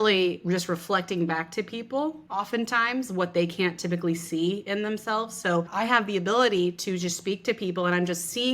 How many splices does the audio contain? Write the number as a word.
two